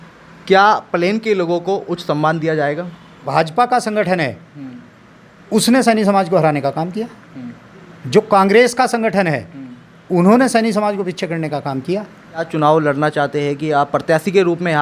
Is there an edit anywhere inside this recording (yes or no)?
yes